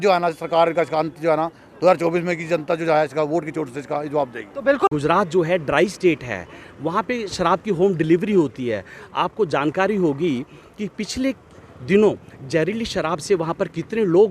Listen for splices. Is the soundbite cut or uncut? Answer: cut